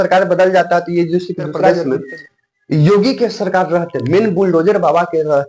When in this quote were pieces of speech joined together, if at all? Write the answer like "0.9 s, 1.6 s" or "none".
1.8 s